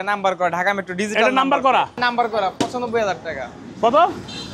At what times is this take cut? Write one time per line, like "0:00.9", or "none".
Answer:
0:02.0